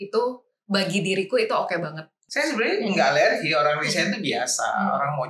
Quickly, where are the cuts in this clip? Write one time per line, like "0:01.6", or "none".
0:02.2